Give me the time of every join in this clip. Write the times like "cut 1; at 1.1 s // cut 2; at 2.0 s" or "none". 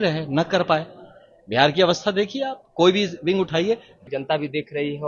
cut 1; at 4.0 s